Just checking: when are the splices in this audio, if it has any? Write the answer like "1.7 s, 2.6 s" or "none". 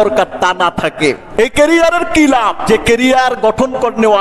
1.2 s, 2.6 s